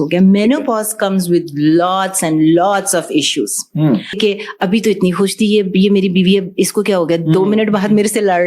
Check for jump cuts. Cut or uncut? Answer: cut